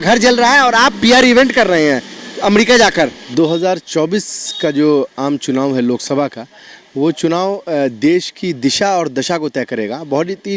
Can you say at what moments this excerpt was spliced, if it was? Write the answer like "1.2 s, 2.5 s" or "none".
3.3 s